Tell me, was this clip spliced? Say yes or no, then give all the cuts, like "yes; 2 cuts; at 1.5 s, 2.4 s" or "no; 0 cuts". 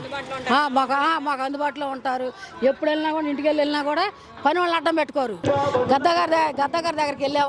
yes; 1 cut; at 5.4 s